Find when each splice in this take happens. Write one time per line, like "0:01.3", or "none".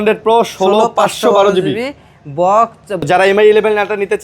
0:03.1